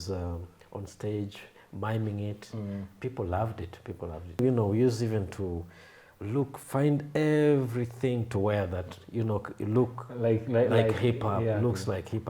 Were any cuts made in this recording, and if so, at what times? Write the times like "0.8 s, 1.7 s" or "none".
4.4 s